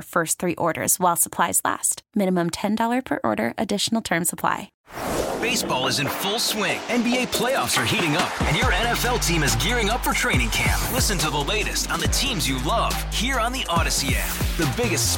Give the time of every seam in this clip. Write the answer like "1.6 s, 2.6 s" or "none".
4.7 s